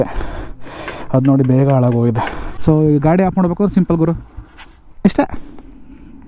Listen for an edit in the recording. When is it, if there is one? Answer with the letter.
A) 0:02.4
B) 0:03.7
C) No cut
A